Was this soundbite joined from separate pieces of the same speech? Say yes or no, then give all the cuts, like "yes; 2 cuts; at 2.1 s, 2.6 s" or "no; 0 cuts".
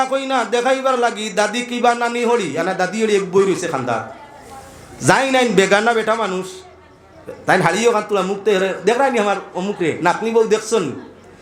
no; 0 cuts